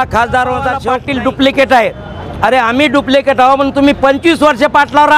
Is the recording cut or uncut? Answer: cut